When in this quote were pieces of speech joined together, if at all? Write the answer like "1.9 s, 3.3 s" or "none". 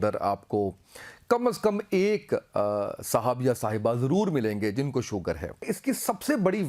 5.7 s